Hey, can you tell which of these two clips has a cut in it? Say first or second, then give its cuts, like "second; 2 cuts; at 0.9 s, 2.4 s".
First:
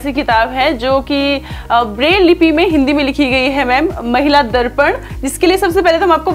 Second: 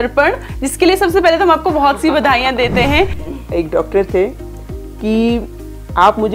second; 1 cut; at 3.2 s